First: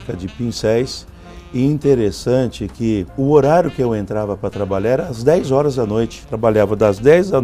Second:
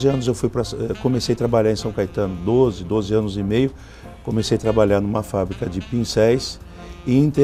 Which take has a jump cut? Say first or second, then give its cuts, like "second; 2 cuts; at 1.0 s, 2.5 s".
first; 2 cuts; at 3.1 s, 6.2 s